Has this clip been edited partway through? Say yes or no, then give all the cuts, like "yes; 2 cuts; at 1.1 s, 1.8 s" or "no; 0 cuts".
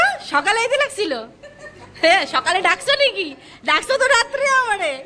no; 0 cuts